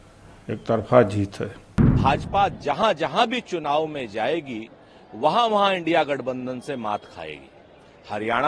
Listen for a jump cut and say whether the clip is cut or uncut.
cut